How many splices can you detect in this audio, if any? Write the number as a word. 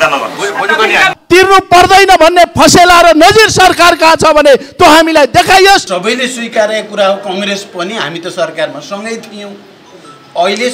two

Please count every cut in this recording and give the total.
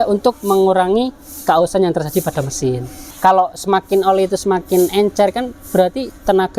one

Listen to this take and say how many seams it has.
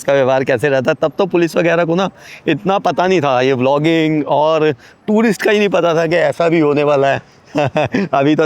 zero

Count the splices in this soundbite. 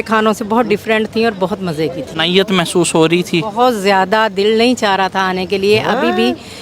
one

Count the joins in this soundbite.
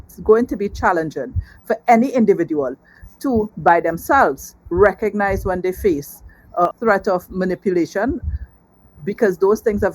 one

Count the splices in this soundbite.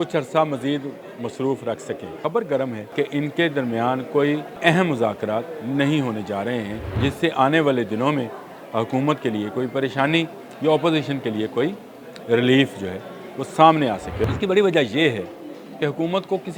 five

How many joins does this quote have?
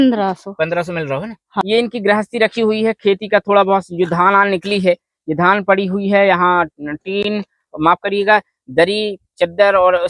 one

